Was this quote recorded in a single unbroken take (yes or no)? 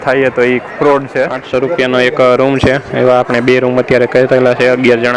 no